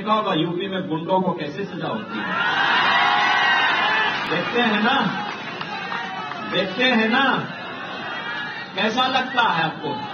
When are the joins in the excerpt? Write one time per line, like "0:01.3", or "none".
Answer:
none